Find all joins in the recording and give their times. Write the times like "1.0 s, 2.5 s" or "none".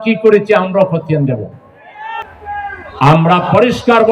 2.3 s